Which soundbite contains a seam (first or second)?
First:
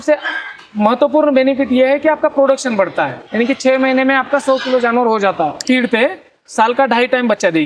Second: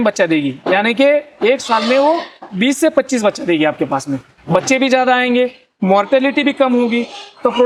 first